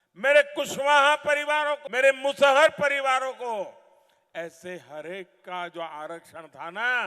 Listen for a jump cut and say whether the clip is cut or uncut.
cut